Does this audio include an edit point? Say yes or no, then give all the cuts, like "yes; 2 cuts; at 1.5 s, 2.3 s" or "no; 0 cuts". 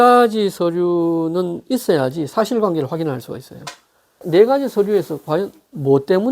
yes; 1 cut; at 4.2 s